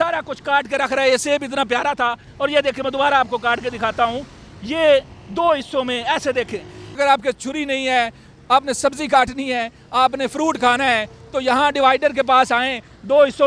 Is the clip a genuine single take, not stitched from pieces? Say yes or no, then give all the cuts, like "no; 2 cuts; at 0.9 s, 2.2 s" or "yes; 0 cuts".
no; 1 cut; at 7.0 s